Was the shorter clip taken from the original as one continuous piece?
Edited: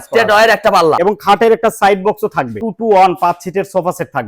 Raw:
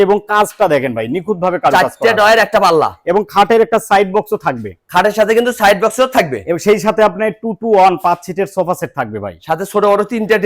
no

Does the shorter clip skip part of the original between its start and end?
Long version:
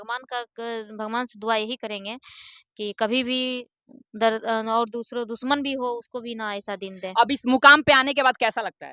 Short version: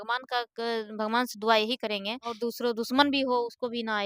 yes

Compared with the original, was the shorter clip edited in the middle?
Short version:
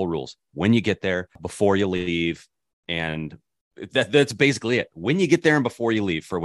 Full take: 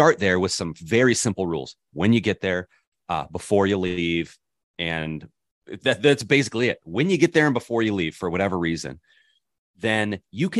yes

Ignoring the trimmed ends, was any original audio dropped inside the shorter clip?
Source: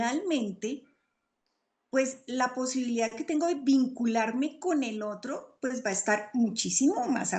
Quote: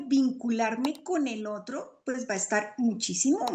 no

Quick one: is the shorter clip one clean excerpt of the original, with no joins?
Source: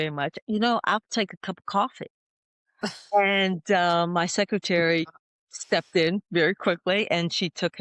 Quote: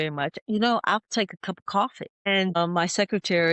no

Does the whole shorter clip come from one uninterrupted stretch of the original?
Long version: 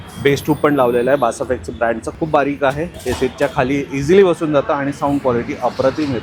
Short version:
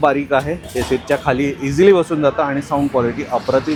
yes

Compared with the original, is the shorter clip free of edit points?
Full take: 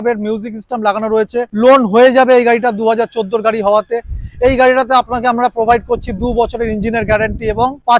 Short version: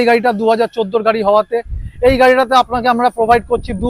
yes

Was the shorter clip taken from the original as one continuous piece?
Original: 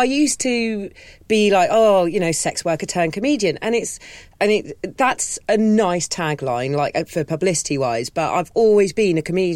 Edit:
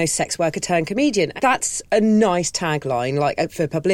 no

